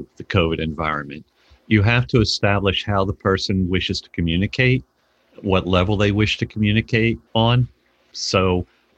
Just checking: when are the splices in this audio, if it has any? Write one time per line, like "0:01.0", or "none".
0:07.2